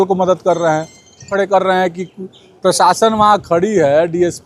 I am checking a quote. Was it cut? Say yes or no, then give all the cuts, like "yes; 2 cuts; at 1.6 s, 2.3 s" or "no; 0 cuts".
yes; 1 cut; at 1.3 s